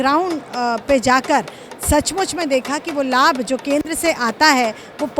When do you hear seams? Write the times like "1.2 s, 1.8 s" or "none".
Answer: none